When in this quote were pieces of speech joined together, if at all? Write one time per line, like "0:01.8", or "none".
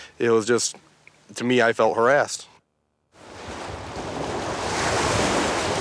0:02.5